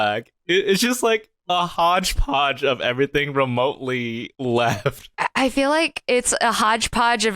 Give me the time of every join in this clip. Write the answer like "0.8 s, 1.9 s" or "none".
4.3 s, 5.1 s